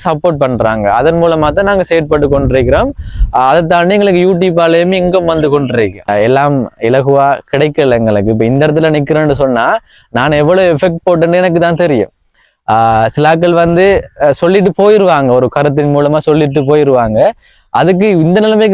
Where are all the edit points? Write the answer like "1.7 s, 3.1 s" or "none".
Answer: 6.0 s